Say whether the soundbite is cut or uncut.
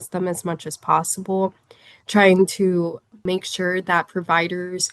cut